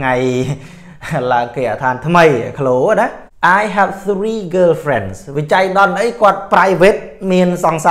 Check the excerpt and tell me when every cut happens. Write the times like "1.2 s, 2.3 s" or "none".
3.2 s